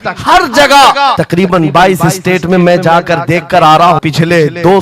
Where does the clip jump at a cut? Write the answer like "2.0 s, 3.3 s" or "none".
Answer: 1.2 s, 4.0 s